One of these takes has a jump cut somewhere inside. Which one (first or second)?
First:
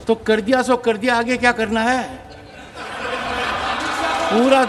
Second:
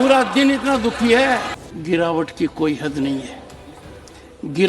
second